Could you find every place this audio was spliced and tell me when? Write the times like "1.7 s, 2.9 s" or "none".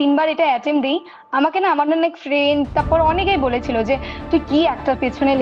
none